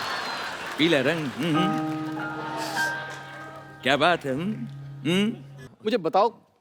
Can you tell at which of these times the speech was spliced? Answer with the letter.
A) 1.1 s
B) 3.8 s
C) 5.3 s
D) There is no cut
C